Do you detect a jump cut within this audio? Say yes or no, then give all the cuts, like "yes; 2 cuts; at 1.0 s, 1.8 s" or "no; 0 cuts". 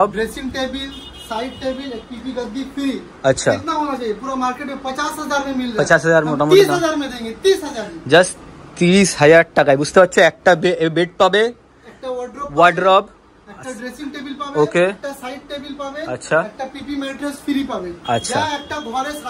no; 0 cuts